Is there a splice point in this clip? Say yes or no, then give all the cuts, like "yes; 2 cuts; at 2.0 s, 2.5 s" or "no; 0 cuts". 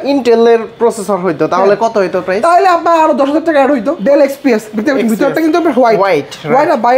yes; 1 cut; at 3.9 s